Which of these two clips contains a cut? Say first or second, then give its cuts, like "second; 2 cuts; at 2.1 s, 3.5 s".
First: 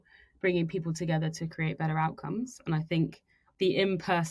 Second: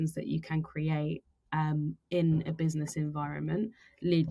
first; 1 cut; at 3.4 s